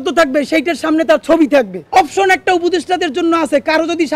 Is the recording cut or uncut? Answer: cut